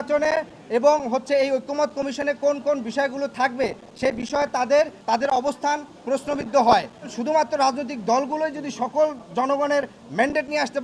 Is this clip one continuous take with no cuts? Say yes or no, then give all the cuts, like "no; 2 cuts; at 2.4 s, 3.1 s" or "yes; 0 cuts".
no; 2 cuts; at 5.0 s, 7.2 s